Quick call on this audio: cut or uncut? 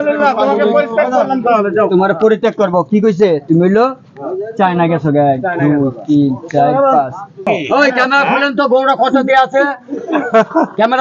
cut